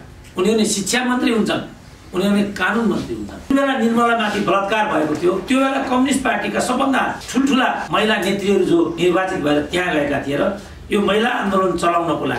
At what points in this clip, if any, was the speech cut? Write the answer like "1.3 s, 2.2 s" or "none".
3.5 s, 5.4 s, 7.5 s, 8.9 s